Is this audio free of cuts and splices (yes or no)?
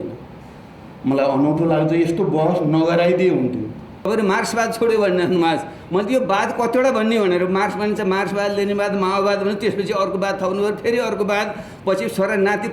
no